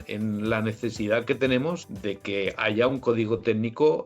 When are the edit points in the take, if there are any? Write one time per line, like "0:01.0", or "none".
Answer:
0:01.8

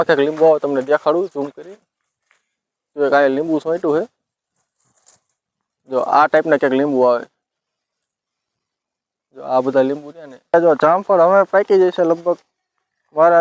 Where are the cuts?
0:10.5

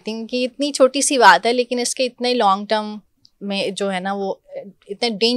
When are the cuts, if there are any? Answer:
none

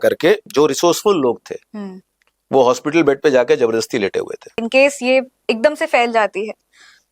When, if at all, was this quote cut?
0:04.6

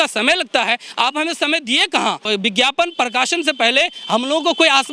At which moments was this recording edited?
0:02.2

